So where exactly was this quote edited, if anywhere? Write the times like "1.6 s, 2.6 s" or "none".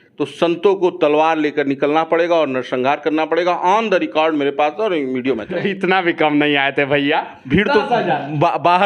5.5 s